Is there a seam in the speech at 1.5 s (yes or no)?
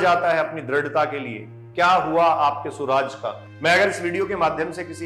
no